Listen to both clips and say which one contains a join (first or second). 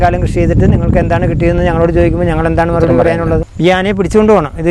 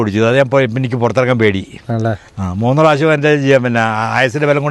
first